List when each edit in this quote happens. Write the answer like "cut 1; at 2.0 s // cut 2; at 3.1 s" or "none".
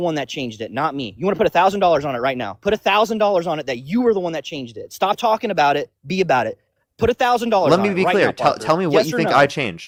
none